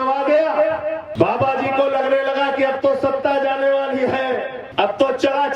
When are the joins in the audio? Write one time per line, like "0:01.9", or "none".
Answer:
0:01.0
0:04.6

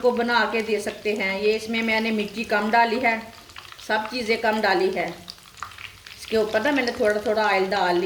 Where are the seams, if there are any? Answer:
none

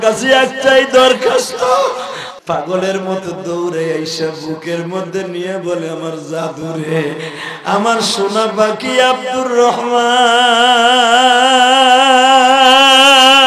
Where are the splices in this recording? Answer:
0:02.2

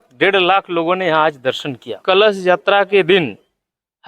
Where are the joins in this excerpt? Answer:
0:01.9

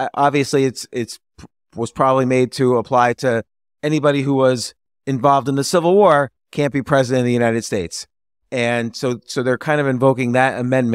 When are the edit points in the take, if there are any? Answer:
none

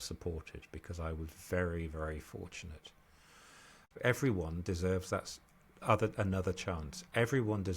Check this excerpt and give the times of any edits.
0:03.8

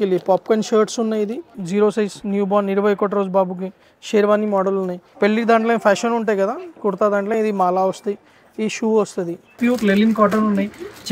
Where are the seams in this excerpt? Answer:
0:01.6
0:05.0
0:09.6

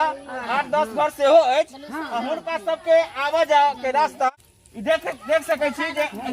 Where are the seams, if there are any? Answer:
0:04.5

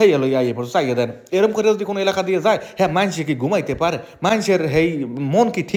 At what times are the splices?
none

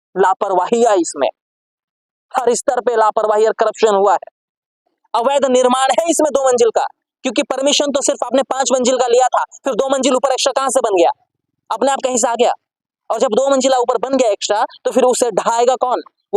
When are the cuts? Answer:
0:05.0

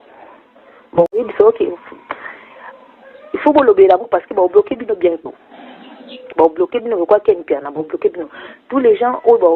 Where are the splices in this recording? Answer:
0:01.2

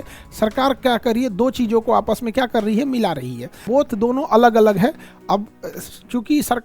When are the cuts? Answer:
0:03.6

